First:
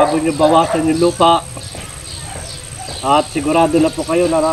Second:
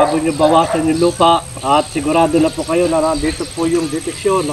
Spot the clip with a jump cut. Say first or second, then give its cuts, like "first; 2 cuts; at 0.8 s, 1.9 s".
second; 1 cut; at 1.5 s